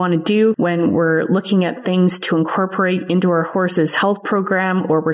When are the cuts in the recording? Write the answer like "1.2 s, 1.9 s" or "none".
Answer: none